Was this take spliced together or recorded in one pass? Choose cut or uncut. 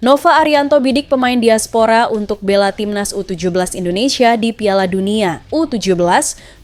uncut